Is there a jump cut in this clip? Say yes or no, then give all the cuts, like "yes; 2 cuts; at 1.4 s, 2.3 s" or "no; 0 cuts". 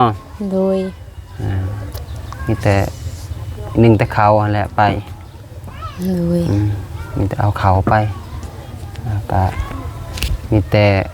no; 0 cuts